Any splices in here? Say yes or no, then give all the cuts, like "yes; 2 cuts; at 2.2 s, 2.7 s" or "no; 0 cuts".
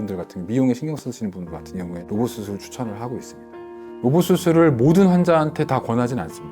yes; 1 cut; at 2.0 s